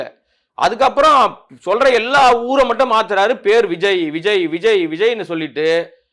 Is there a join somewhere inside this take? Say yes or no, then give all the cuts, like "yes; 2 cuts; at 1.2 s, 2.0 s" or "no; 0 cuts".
no; 0 cuts